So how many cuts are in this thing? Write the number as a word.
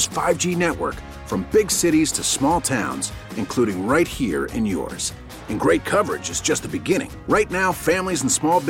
zero